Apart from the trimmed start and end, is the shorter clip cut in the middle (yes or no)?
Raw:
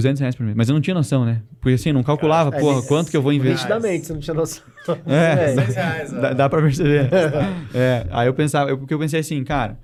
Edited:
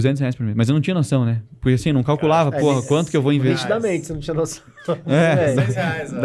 no